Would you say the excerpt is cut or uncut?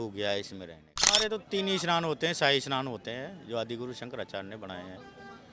cut